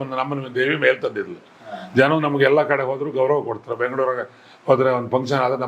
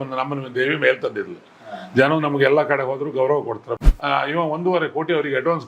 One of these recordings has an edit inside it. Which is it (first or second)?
second